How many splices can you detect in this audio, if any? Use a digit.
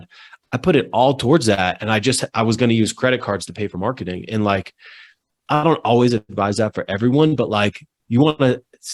0